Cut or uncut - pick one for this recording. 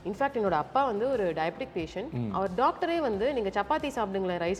uncut